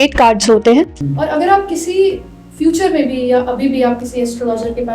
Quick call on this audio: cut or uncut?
cut